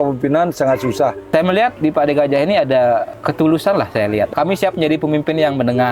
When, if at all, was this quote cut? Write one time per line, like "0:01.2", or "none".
0:01.7
0:03.1
0:04.3

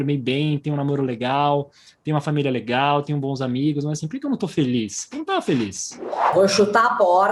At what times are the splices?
0:06.3

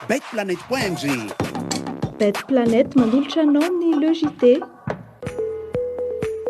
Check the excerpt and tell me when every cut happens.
0:05.1

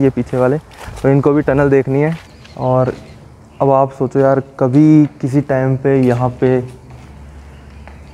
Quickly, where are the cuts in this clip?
0:02.3

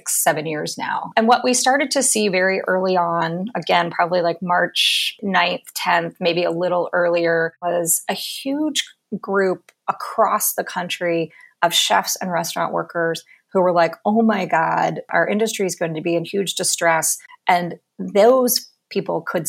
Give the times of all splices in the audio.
0:01.1
0:05.0
0:07.6
0:15.1
0:17.2

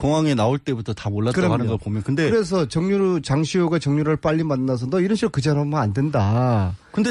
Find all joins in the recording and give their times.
none

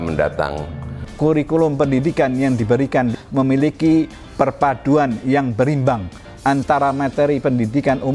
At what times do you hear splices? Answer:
0:01.0
0:03.1

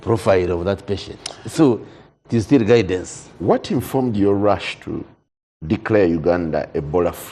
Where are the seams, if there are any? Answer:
none

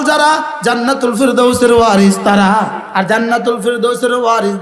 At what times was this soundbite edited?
0:02.8

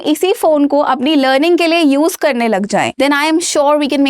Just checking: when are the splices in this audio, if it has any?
0:02.9

